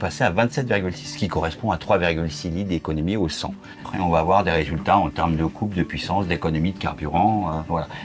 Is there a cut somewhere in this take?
yes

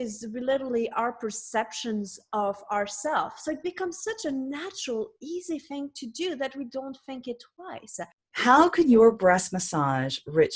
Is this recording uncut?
no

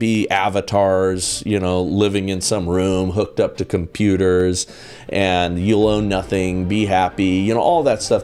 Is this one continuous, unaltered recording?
yes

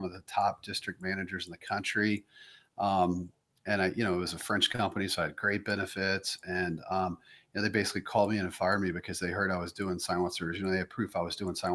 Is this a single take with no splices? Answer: yes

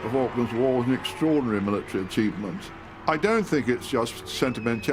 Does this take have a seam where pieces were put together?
no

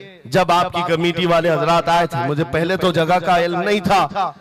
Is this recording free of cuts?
yes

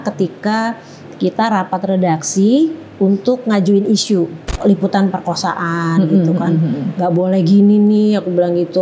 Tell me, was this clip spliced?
yes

